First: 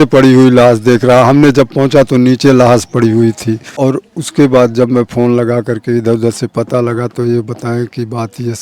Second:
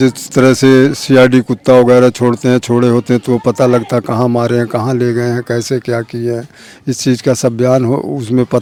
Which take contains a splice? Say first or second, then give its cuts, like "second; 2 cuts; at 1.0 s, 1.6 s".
first; 1 cut; at 3.7 s